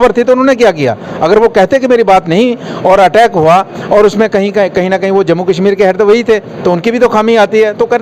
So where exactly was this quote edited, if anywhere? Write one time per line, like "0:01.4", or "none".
none